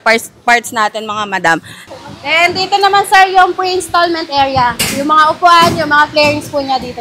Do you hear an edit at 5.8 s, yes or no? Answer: no